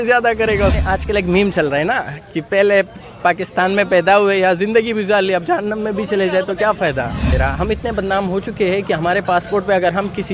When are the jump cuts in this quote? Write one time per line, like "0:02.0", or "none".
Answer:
0:00.8
0:07.3